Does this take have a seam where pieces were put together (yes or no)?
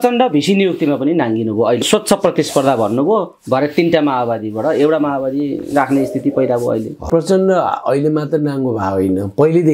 yes